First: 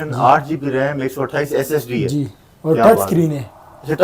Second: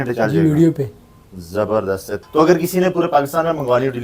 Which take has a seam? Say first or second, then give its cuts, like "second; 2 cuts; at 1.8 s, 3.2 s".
second; 1 cut; at 2.2 s